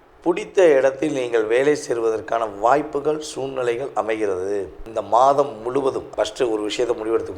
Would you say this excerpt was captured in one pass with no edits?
no; 2 cuts; at 4.8 s, 6.0 s

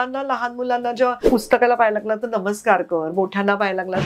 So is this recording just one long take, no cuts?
no; 1 cut; at 1.3 s

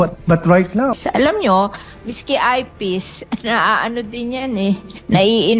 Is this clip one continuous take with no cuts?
no; 1 cut; at 0.9 s

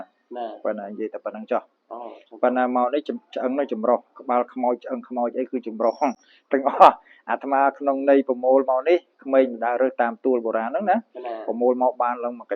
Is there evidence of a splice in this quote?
no; 0 cuts

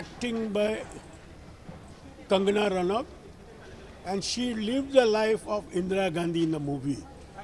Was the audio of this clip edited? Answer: no; 0 cuts

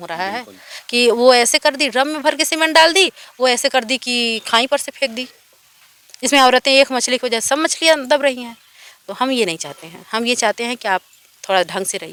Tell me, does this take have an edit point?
no; 0 cuts

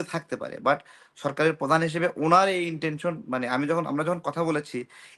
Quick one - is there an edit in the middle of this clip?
no; 0 cuts

